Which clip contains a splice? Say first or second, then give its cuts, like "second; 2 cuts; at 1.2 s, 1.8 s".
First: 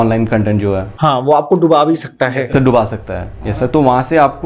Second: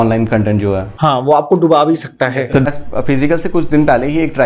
second; 1 cut; at 2.7 s